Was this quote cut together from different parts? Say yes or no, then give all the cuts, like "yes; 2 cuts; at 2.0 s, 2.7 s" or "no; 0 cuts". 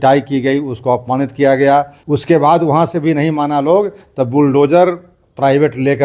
yes; 1 cut; at 2.0 s